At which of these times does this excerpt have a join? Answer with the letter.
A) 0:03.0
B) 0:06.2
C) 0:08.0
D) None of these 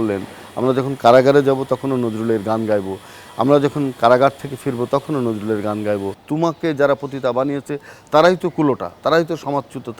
B